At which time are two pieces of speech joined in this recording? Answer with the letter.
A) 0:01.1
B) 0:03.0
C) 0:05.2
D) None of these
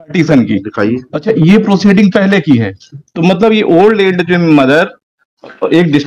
D